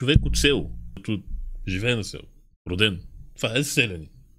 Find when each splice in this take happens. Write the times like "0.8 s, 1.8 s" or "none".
1.0 s

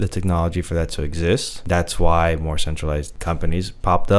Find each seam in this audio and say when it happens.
1.5 s, 3.1 s

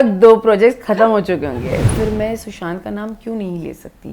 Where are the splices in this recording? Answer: 1.9 s

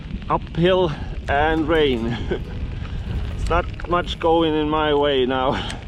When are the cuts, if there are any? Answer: none

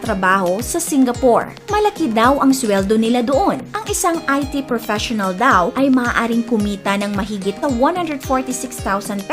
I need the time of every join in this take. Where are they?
1.6 s, 3.8 s, 7.6 s

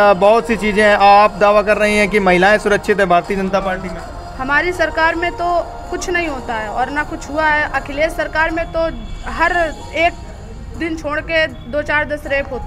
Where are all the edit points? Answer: none

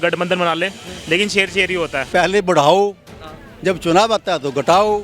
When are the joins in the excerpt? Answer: 2.1 s

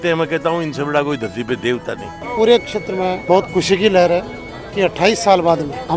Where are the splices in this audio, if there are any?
2.2 s

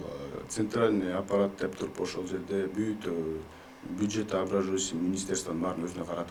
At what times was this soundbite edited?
none

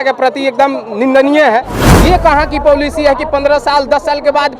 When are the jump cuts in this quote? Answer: 1.8 s

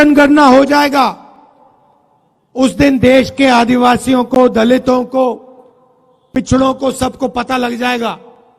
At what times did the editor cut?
none

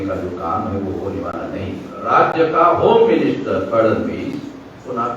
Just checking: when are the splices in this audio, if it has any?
2.0 s

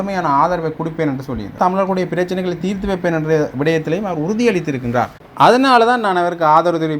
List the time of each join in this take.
1.6 s

